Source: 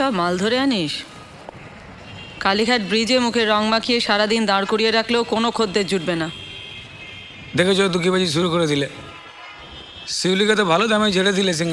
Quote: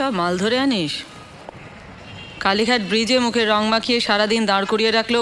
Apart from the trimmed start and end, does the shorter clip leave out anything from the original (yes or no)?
no